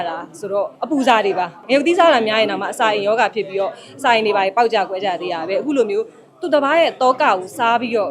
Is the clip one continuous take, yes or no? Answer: no